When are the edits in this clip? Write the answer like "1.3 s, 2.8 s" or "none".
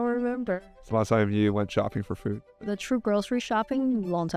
2.5 s